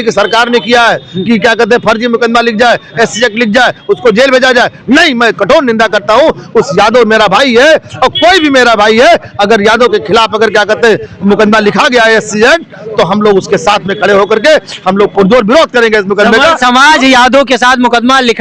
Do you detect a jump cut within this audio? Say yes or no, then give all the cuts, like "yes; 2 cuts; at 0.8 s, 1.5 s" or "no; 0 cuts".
no; 0 cuts